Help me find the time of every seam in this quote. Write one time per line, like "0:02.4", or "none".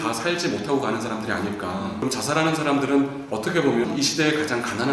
0:02.0
0:03.8